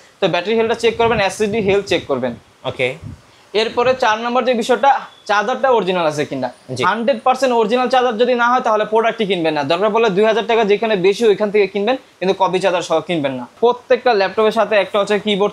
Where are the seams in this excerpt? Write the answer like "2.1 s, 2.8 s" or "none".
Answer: 13.5 s